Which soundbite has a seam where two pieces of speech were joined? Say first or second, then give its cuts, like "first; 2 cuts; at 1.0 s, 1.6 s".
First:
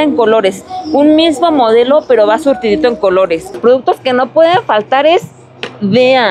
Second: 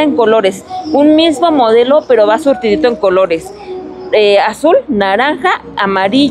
first; 1 cut; at 3.6 s